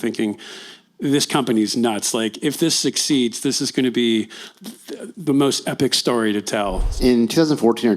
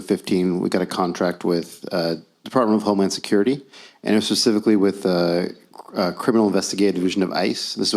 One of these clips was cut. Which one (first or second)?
first